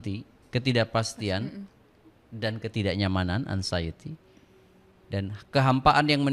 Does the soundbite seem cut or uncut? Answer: uncut